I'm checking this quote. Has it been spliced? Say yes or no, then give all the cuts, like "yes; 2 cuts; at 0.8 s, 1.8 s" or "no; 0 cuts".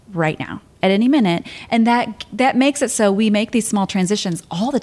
no; 0 cuts